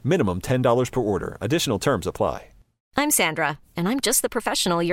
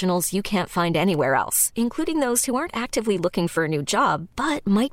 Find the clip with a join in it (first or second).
first